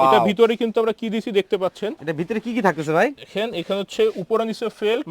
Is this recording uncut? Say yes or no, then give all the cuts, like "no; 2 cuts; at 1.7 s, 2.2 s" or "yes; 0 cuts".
yes; 0 cuts